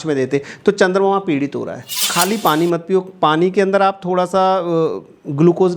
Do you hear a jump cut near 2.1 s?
yes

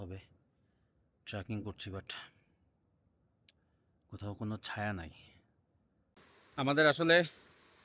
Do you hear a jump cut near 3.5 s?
no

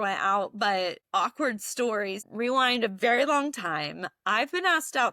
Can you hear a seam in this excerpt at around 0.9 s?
no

